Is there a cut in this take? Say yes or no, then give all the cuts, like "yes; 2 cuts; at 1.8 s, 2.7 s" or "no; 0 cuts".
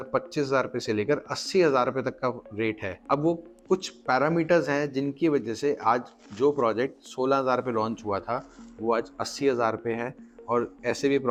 no; 0 cuts